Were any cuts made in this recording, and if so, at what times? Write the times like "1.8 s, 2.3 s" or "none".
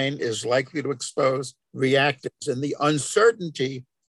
1.6 s